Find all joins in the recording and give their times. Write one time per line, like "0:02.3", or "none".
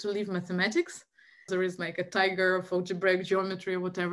0:01.5